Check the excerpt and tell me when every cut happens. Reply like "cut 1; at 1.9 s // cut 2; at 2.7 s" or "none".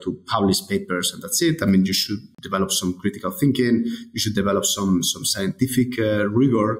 cut 1; at 2.3 s